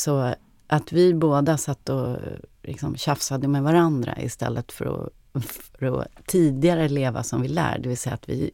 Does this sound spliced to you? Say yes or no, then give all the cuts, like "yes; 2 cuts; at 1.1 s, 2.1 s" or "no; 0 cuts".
no; 0 cuts